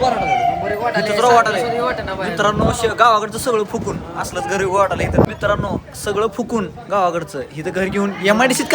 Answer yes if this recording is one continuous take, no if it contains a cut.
no